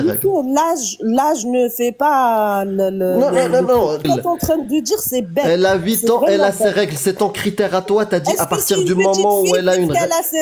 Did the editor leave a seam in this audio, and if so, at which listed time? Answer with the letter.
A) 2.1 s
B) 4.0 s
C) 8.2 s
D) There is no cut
B